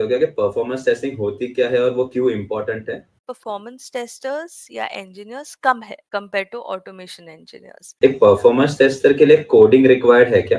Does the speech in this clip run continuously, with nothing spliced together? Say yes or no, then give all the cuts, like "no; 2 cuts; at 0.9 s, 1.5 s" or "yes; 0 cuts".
no; 3 cuts; at 3.3 s, 5.9 s, 7.9 s